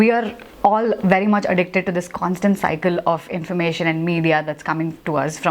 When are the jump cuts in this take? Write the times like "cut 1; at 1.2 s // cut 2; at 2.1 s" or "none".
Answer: none

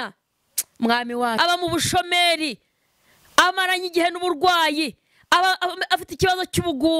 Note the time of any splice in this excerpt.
cut 1; at 1.4 s

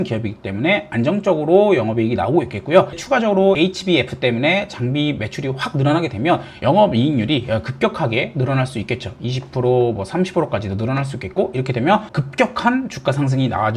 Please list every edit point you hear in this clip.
cut 1; at 3.0 s // cut 2; at 12.1 s

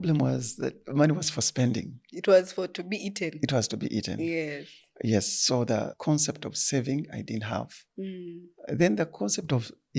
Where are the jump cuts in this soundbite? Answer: cut 1; at 5.9 s

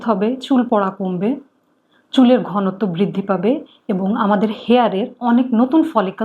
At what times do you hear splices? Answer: none

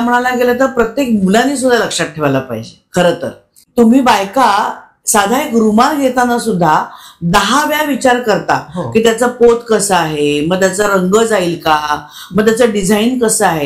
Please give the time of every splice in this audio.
cut 1; at 3.6 s

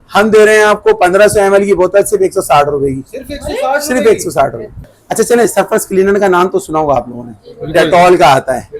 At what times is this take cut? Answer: cut 1; at 5.0 s

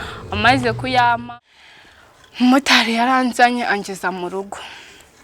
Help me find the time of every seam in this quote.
cut 1; at 1.2 s

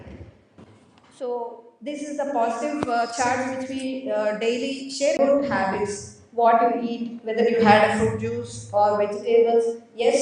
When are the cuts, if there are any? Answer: cut 1; at 5.2 s

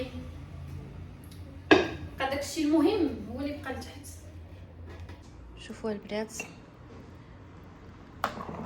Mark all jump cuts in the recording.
cut 1; at 5.2 s

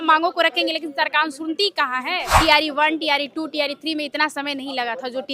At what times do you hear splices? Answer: cut 1; at 2.3 s

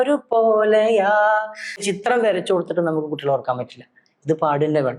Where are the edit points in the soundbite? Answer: cut 1; at 1.8 s

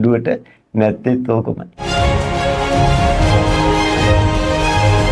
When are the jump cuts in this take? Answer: cut 1; at 1.7 s

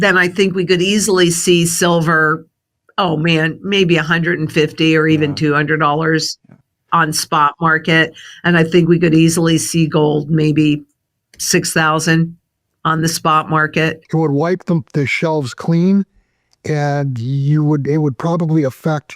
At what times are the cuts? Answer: cut 1; at 14.0 s

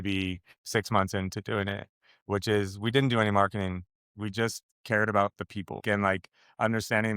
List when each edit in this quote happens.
cut 1; at 5.8 s

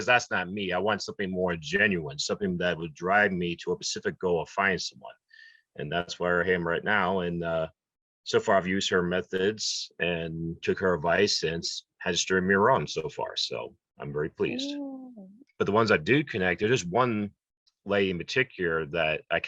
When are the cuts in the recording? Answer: cut 1; at 15.3 s

